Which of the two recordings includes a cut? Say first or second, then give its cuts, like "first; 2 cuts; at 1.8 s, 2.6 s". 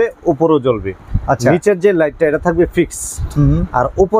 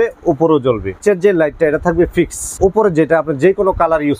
second; 2 cuts; at 1.0 s, 2.5 s